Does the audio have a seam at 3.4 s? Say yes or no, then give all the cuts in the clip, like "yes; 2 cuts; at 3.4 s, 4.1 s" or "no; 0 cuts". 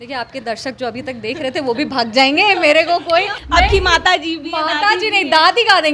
yes; 1 cut; at 3.4 s